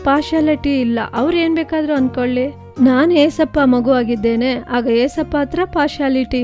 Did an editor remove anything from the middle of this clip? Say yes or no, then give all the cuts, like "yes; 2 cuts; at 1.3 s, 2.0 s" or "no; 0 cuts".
no; 0 cuts